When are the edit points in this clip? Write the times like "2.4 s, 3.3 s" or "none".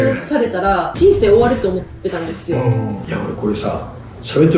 0.9 s, 3.0 s